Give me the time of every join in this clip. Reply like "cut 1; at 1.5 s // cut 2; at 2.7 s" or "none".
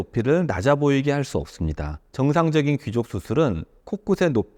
cut 1; at 2.0 s